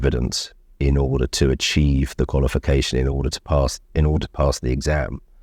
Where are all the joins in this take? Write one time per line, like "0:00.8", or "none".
none